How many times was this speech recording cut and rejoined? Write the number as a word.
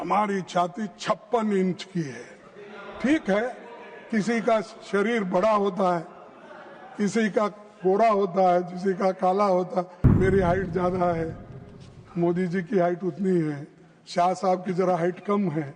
one